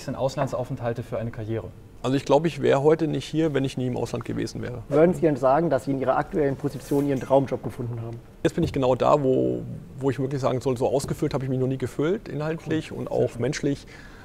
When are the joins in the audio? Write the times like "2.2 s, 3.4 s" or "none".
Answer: 1.8 s, 4.8 s, 8.4 s